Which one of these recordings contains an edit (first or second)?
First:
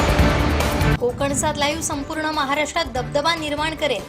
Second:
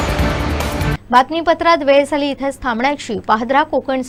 first